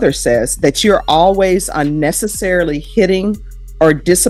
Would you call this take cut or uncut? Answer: uncut